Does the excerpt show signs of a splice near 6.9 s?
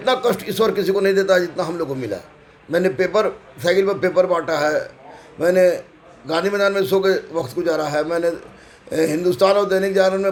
no; 0 cuts

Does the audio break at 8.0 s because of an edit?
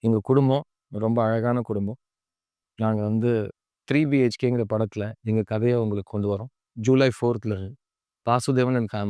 no; 1 cut; at 6.6 s

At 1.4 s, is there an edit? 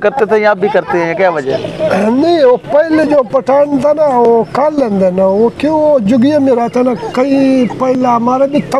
no; 0 cuts

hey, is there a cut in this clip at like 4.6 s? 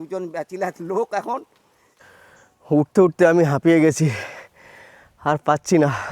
no; 1 cut; at 1.9 s

